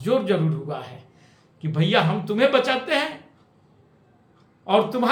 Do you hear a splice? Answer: no; 0 cuts

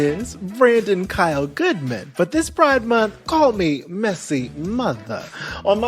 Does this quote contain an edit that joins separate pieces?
no; 0 cuts

